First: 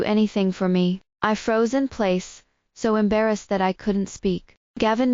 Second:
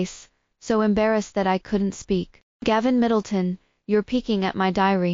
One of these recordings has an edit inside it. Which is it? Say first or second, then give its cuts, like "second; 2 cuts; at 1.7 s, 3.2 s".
first; 1 cut; at 1.1 s